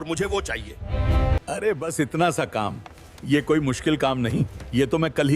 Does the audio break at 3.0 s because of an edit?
no; 0 cuts

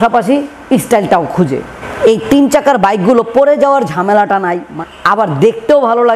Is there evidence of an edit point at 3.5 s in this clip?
no; 2 cuts; at 1.7 s, 4.7 s

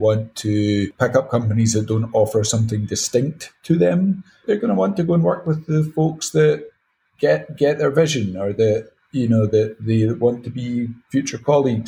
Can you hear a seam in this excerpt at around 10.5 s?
no; 2 cuts; at 0.9 s, 4.4 s

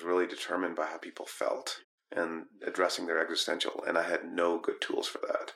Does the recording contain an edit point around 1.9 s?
yes; 1 cut; at 1.9 s

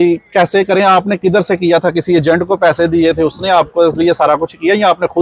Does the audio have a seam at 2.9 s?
no; 0 cuts

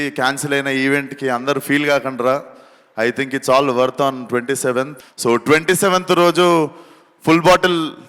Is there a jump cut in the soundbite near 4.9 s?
yes; 1 cut; at 4.9 s

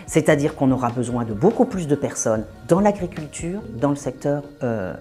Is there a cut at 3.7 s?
yes; 1 cut; at 3.7 s

